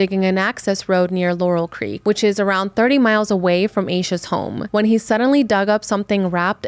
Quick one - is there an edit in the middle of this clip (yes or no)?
yes